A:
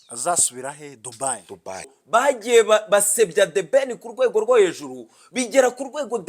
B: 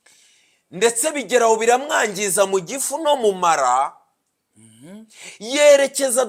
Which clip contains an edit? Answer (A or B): A